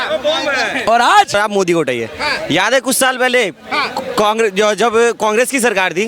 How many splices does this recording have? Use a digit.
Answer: 1